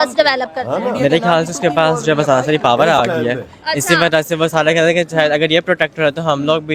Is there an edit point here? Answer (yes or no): no